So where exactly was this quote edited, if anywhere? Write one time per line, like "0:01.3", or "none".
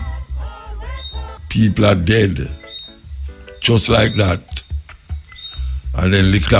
0:01.4